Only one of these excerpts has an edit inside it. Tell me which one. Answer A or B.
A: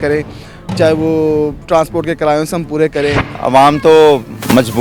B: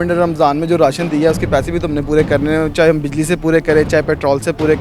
A